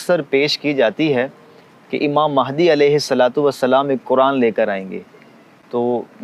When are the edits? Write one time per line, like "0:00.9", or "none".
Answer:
none